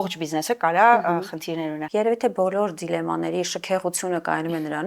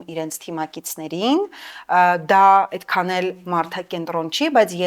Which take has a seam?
first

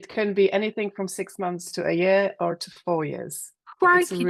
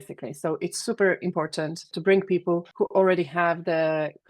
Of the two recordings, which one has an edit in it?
second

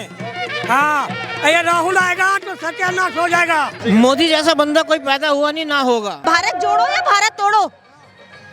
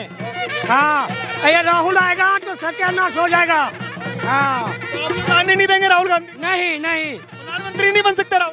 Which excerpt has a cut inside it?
first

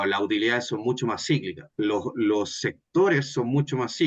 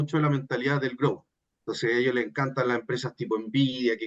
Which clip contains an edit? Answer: first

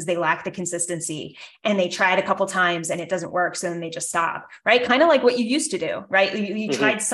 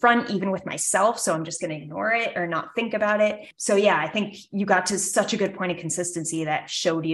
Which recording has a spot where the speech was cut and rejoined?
second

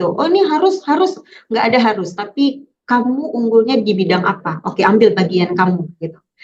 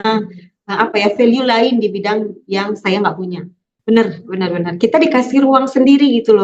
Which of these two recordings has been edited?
second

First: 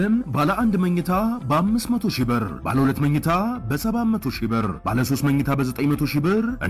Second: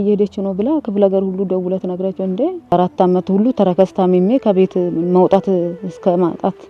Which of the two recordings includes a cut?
second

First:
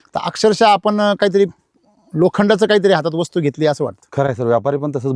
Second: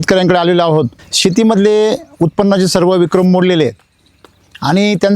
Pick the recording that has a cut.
second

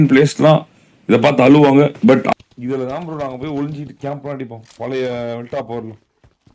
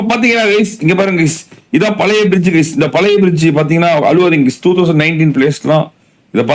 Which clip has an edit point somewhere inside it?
first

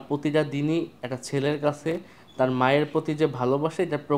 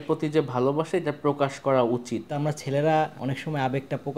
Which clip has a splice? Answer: second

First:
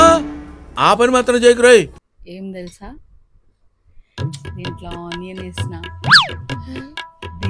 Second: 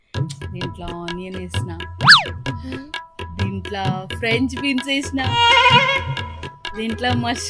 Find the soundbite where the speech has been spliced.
first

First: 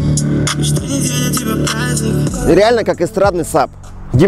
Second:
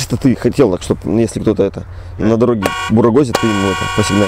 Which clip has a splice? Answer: first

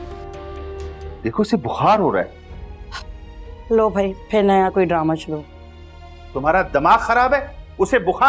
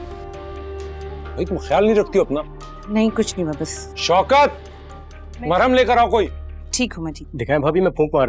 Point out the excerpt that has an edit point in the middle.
first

